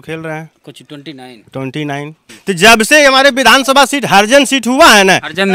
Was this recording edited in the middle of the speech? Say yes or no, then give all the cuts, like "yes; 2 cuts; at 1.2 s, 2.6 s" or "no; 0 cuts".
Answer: yes; 1 cut; at 2.4 s